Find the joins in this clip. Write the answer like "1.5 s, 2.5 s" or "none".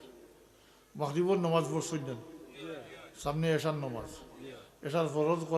none